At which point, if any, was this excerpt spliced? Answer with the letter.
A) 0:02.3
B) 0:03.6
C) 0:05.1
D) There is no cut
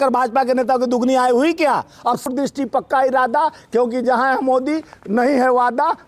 A